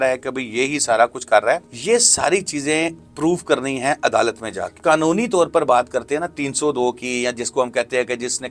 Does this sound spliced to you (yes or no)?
yes